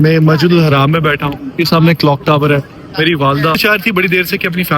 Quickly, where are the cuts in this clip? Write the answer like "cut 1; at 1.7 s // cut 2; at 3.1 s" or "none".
cut 1; at 3.6 s